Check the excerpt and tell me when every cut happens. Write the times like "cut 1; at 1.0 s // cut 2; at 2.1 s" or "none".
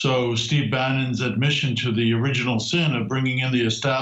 none